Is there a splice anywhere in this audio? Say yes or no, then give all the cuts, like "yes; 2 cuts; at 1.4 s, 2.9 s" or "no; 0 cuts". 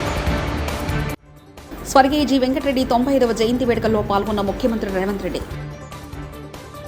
no; 0 cuts